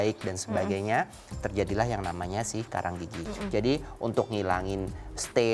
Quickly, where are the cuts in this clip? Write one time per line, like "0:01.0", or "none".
0:03.2